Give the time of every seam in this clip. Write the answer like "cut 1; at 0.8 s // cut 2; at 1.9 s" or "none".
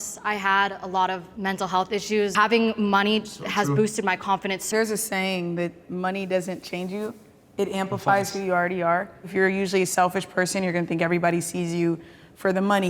cut 1; at 2.3 s // cut 2; at 4.7 s